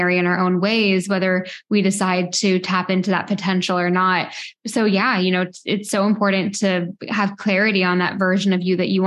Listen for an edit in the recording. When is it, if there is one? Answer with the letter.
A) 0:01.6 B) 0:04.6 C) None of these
B